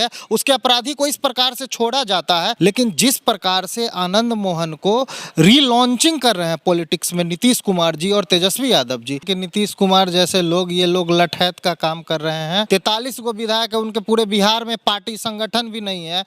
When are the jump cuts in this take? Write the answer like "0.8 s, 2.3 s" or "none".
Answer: 2.5 s, 9.2 s, 12.7 s